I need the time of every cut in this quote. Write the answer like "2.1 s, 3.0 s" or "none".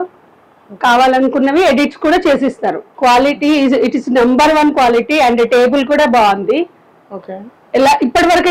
2.9 s

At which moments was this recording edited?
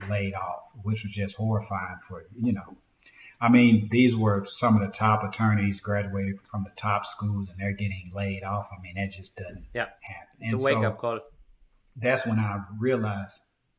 none

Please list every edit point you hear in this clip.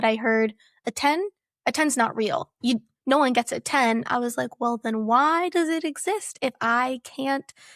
none

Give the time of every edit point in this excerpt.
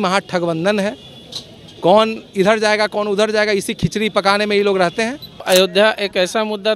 5.4 s

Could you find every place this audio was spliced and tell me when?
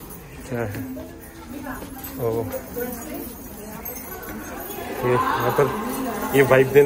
none

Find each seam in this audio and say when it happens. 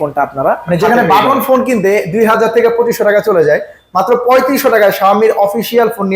none

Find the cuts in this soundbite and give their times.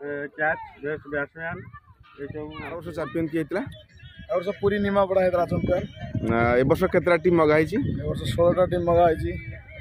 2.9 s

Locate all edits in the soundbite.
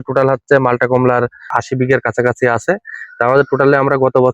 1.5 s

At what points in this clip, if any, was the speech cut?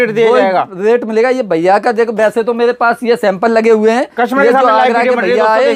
none

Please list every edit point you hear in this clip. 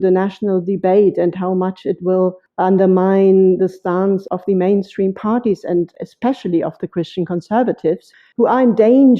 2.4 s, 4.2 s, 8.0 s

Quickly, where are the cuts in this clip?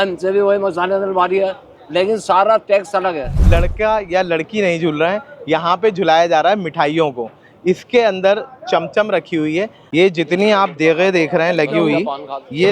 3.3 s, 9.8 s

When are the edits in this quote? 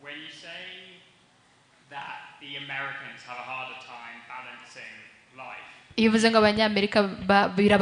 none

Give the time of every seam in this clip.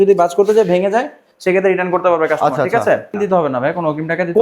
3.1 s

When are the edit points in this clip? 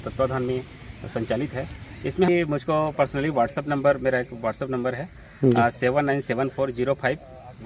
2.3 s

